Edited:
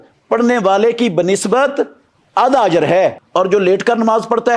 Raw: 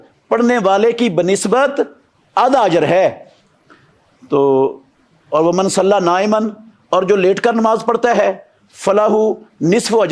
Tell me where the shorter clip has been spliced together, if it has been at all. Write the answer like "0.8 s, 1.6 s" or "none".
3.2 s